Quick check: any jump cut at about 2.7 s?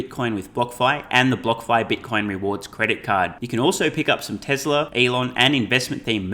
no; 1 cut; at 4.9 s

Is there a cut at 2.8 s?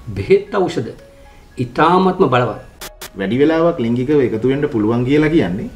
yes; 1 cut; at 2.8 s

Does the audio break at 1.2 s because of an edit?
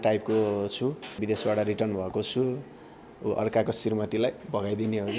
yes; 1 cut; at 1.2 s

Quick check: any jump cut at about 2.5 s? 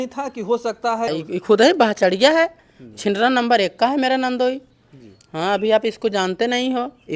no; 1 cut; at 1.1 s

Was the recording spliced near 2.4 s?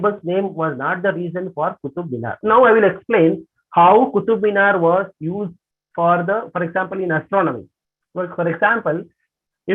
yes; 1 cut; at 2.4 s

